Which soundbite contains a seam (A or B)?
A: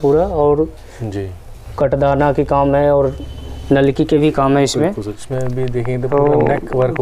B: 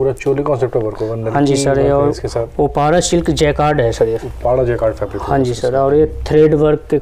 A